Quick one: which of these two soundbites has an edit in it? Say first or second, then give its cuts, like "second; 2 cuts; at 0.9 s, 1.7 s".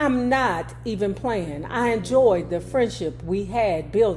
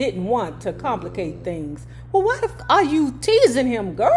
second; 1 cut; at 2.5 s